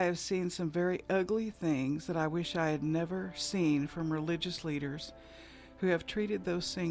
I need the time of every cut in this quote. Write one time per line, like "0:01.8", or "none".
none

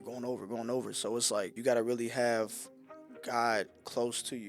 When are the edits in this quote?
0:01.5

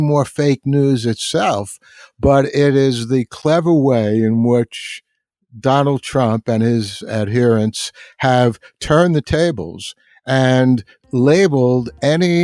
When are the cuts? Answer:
none

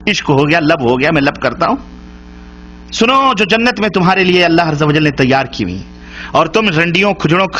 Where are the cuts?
none

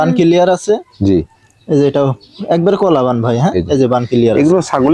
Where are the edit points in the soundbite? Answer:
none

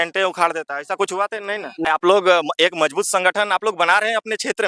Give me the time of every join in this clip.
0:01.9

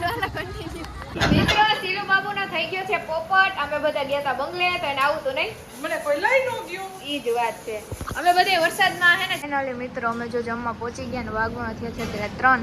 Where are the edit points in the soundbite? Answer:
0:01.0
0:09.3

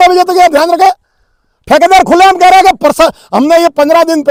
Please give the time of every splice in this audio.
none

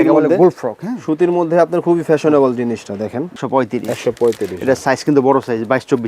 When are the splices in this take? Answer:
0:03.3

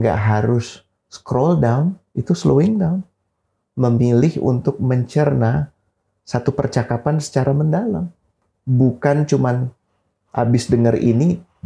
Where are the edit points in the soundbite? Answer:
none

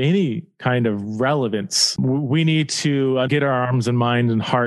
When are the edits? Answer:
0:01.9
0:03.3

